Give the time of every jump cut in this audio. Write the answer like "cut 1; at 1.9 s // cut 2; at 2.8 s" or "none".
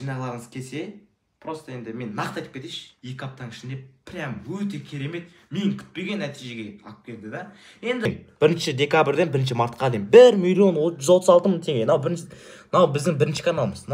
cut 1; at 2.9 s // cut 2; at 8.1 s